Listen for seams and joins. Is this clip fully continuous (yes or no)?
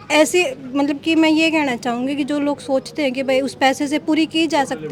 yes